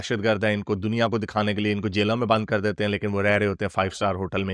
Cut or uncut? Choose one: uncut